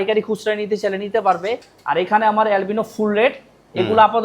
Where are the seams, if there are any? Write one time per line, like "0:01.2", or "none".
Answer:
0:01.7